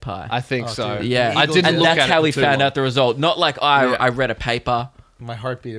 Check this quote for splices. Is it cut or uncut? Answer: uncut